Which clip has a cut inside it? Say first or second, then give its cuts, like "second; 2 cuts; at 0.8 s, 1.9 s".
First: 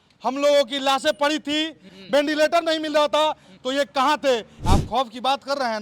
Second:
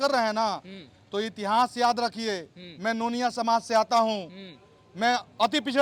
first; 2 cuts; at 2.0 s, 4.5 s